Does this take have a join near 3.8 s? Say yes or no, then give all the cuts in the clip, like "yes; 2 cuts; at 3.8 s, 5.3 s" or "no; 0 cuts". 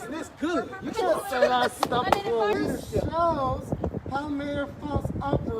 no; 1 cut; at 2.5 s